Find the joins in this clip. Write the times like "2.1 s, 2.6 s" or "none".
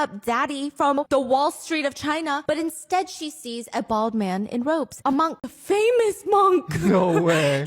1.0 s, 5.5 s